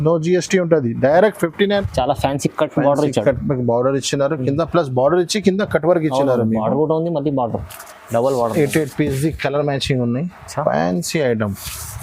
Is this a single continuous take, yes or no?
no